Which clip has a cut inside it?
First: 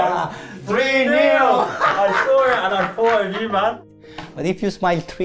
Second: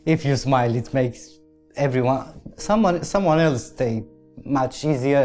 first; 1 cut; at 3.8 s

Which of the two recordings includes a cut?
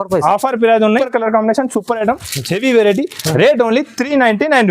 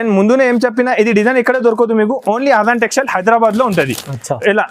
first; 1 cut; at 1.0 s

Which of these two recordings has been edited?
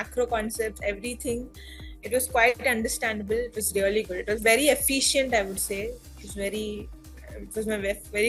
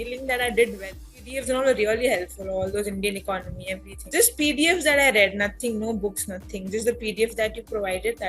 second; 2 cuts; at 1.3 s, 3.9 s

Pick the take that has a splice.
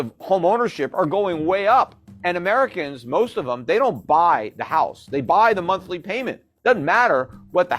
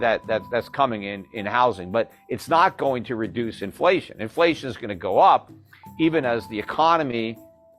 first; 1 cut; at 2.1 s

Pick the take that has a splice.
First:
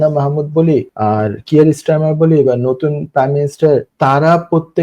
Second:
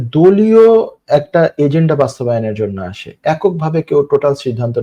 first; 2 cuts; at 0.9 s, 3.9 s

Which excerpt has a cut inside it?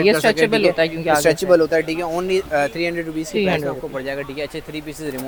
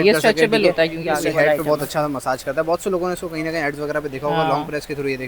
second; 1 cut; at 1.1 s

